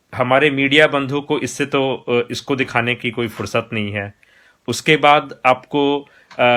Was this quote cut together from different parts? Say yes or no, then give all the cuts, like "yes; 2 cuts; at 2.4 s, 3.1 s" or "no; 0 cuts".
no; 0 cuts